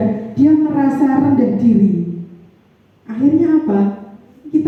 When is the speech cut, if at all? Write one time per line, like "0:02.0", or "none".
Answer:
none